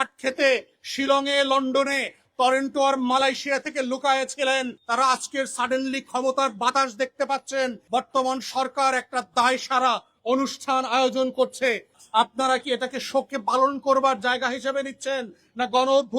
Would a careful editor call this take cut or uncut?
cut